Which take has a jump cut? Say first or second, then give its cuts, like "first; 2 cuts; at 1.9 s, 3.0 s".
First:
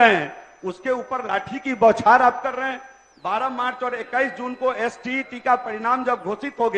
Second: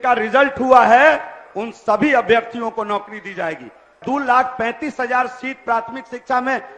second; 1 cut; at 4.0 s